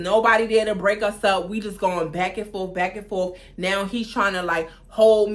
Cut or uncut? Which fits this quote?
uncut